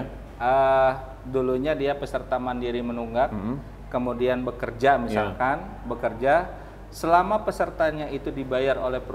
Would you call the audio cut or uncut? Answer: uncut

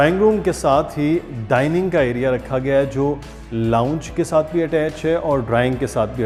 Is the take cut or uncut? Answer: uncut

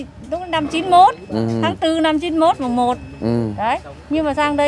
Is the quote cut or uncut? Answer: uncut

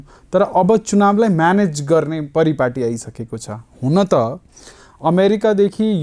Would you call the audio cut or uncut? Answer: uncut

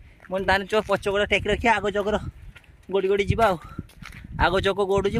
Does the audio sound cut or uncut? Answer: uncut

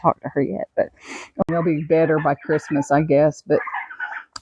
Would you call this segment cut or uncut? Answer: cut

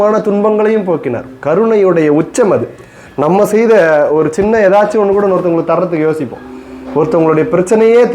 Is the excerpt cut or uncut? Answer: uncut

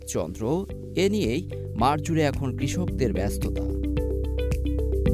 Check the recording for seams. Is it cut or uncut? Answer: uncut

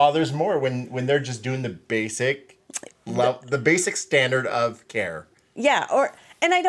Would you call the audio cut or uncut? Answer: uncut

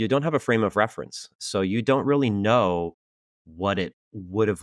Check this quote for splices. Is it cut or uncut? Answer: uncut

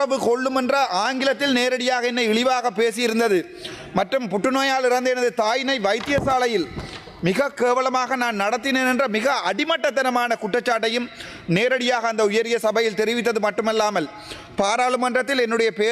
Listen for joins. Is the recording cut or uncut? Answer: uncut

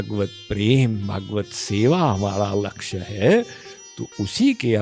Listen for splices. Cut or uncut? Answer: uncut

